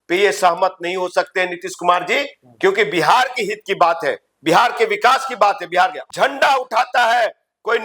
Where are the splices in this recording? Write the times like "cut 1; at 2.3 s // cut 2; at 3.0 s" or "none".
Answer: cut 1; at 6.0 s